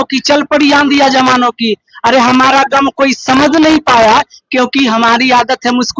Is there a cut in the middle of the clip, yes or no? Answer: no